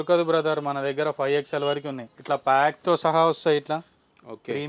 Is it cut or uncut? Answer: cut